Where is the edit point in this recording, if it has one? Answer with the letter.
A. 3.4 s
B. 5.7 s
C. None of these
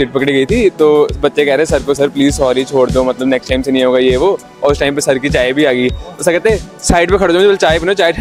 C